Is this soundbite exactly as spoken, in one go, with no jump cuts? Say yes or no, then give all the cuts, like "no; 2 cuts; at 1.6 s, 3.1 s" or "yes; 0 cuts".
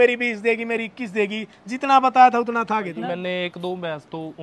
no; 1 cut; at 3.0 s